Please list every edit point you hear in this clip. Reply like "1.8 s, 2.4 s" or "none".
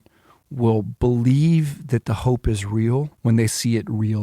3.1 s